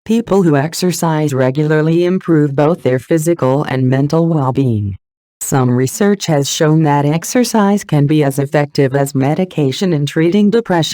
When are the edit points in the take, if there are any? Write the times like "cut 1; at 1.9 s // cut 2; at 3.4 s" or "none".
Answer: cut 1; at 4.3 s